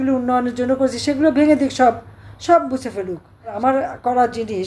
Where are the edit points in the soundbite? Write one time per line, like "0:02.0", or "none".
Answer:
0:03.6

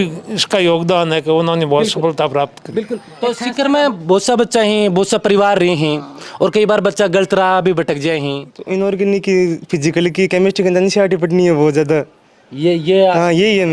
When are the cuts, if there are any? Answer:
0:03.0
0:08.5

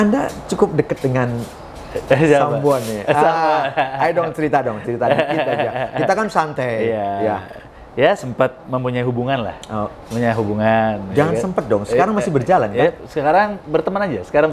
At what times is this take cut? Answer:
none

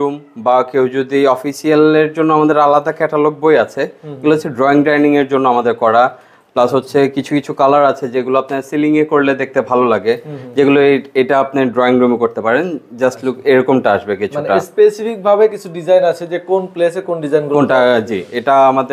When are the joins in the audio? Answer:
none

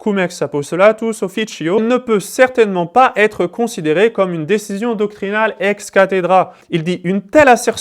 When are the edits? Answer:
0:01.8
0:06.6

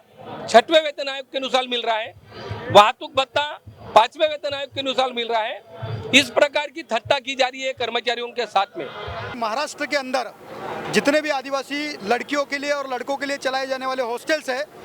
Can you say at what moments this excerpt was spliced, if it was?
0:09.3

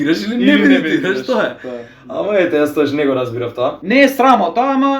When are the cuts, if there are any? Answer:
0:03.8

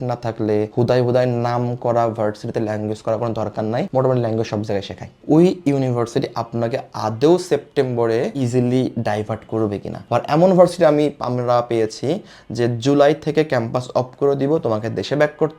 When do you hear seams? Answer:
0:05.2
0:10.0

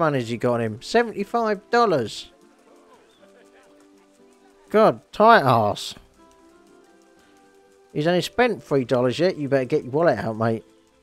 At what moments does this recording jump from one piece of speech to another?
none

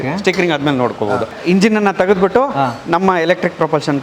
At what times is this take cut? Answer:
0:01.3

